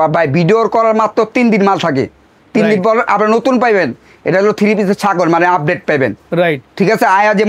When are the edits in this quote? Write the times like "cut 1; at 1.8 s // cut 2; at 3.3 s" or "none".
none